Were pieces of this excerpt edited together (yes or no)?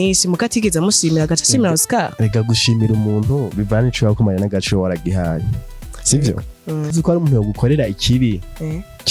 yes